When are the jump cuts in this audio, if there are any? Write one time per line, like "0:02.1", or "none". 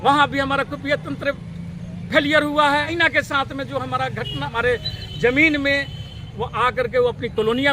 0:02.9
0:04.5